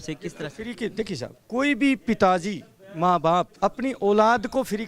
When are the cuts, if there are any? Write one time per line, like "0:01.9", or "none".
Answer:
0:01.4
0:03.5